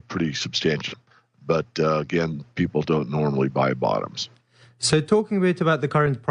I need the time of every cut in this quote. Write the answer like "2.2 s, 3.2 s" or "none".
none